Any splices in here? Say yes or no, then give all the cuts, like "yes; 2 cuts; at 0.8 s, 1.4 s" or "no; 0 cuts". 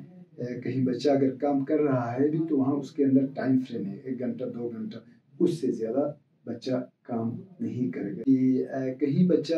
yes; 1 cut; at 8.2 s